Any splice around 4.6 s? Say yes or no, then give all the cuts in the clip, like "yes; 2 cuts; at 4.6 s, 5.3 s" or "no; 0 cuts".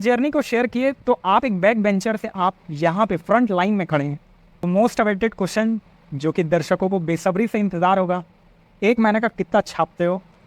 yes; 1 cut; at 4.6 s